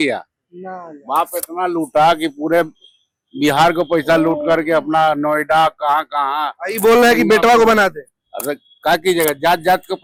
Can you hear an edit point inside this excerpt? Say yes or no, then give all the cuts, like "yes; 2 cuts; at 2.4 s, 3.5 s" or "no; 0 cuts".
no; 0 cuts